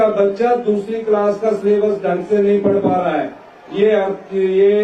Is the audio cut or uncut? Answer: uncut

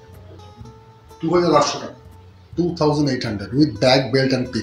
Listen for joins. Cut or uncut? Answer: uncut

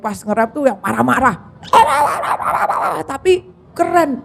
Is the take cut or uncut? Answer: uncut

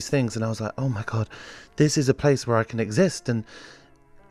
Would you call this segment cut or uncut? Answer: uncut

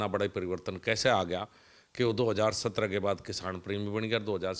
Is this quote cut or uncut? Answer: uncut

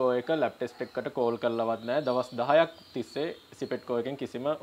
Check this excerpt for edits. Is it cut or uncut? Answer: uncut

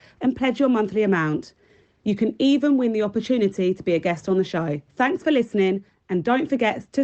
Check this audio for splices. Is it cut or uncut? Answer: cut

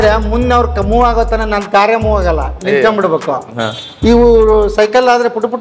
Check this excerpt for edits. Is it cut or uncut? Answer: uncut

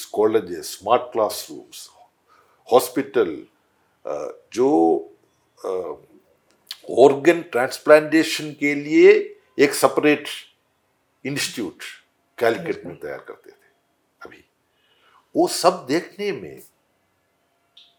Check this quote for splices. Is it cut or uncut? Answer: uncut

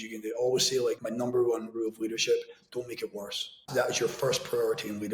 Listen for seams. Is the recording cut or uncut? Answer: cut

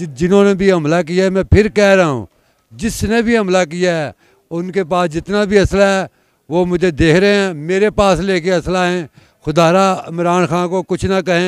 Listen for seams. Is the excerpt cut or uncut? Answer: uncut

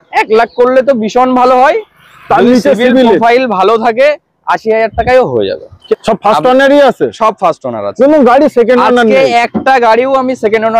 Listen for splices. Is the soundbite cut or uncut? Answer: cut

